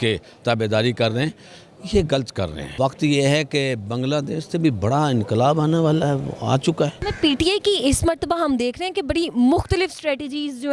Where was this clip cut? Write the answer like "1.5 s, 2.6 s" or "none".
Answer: 2.6 s, 7.0 s